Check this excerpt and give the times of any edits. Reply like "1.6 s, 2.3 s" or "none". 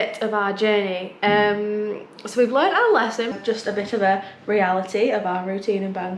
3.3 s